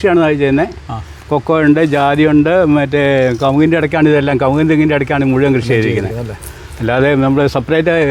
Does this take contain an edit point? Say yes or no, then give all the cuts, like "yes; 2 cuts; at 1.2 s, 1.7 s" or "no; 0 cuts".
no; 0 cuts